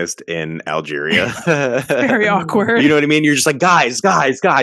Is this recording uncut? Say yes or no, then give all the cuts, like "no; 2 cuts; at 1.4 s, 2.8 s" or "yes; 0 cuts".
yes; 0 cuts